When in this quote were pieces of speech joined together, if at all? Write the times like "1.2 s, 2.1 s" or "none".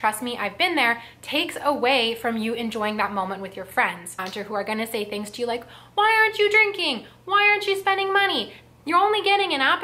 4.1 s